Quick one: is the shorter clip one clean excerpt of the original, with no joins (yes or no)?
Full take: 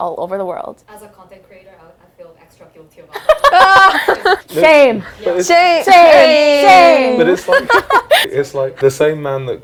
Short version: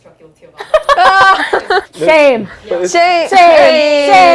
yes